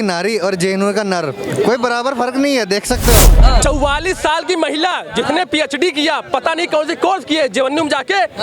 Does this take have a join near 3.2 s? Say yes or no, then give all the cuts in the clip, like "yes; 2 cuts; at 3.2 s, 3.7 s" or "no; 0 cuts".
yes; 1 cut; at 3.2 s